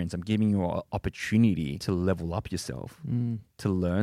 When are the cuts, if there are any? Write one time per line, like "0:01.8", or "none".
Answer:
0:01.8